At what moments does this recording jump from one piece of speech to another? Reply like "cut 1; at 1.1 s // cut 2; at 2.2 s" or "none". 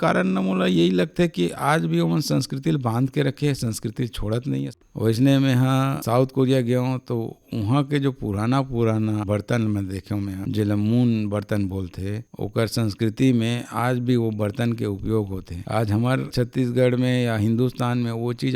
cut 1; at 4.7 s